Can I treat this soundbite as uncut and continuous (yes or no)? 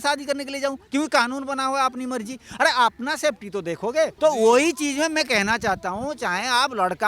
no